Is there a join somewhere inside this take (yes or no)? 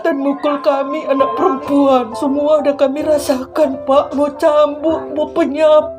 no